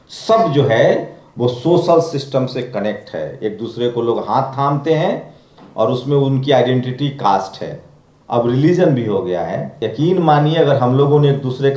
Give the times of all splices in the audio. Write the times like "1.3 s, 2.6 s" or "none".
9.8 s